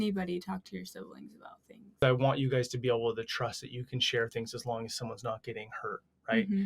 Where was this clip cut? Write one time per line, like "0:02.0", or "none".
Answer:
0:02.0